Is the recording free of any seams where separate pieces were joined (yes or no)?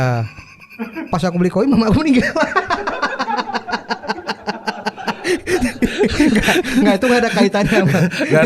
yes